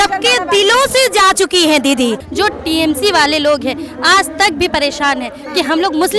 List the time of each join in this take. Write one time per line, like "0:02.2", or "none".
0:02.2